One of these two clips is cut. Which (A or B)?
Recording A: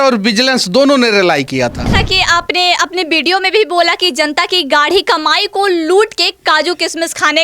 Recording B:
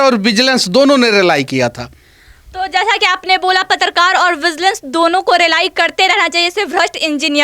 A